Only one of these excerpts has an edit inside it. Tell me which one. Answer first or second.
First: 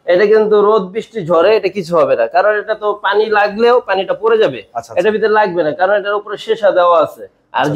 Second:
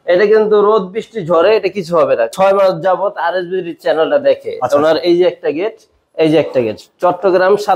second